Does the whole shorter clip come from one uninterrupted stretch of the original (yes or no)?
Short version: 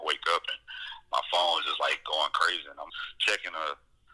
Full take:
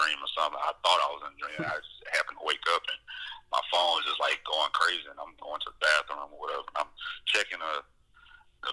no